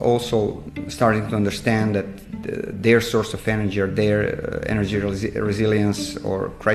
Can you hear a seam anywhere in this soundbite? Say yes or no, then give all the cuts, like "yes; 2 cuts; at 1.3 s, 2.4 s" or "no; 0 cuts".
no; 0 cuts